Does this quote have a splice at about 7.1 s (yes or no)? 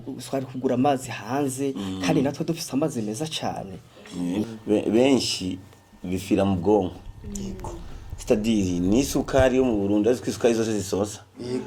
no